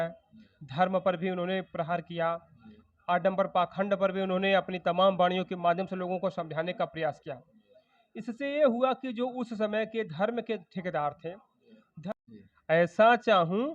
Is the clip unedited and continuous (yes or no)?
no